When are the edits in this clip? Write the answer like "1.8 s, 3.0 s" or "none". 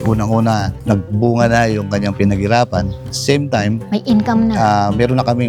none